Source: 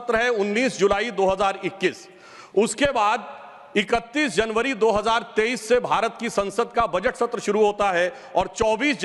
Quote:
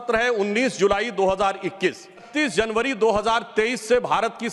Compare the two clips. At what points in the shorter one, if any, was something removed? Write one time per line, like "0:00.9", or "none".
0:02.3